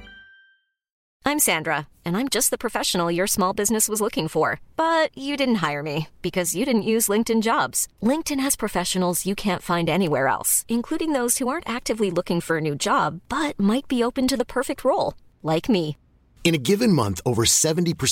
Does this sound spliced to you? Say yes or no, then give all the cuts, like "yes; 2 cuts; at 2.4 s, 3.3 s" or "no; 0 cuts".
yes; 1 cut; at 1.0 s